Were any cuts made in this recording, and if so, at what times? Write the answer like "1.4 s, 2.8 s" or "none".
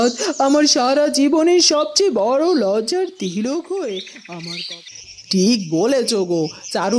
4.7 s